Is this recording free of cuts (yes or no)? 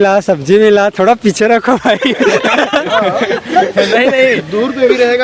yes